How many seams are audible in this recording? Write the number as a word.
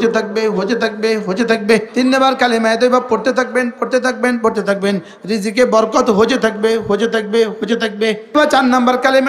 two